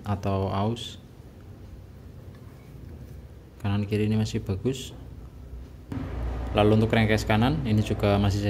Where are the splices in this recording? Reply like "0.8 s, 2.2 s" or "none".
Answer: 5.9 s